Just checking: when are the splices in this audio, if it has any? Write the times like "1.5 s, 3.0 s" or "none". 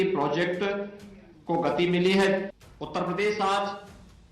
2.5 s